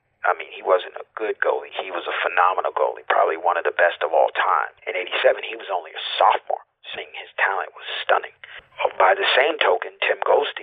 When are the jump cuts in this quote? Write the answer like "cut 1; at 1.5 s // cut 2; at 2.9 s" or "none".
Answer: cut 1; at 4.8 s // cut 2; at 7.0 s // cut 3; at 8.6 s